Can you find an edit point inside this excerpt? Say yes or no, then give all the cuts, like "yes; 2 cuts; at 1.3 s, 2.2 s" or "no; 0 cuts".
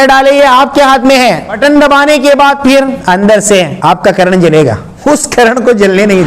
yes; 4 cuts; at 1.6 s, 3.0 s, 3.7 s, 4.9 s